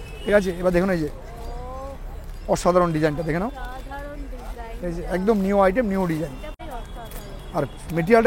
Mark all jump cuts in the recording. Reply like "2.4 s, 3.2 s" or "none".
6.5 s